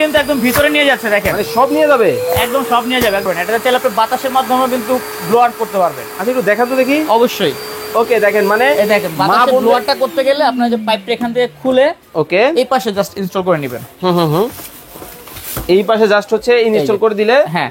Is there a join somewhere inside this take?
yes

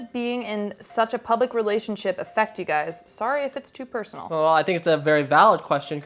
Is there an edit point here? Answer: no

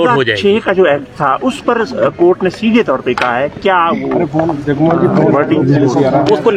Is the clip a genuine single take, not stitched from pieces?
yes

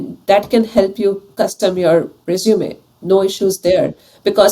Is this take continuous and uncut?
yes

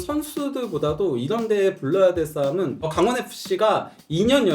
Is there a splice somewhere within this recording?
yes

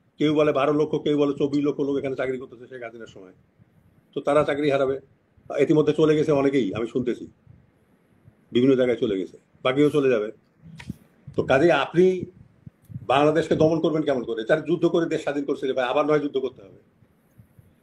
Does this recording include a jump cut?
no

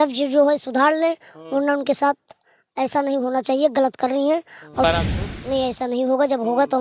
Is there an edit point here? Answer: yes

